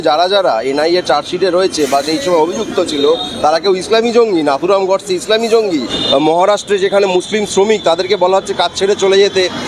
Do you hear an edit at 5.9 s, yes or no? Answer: yes